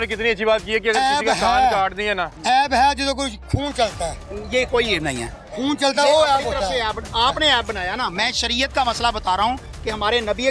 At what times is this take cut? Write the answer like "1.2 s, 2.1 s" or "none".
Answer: none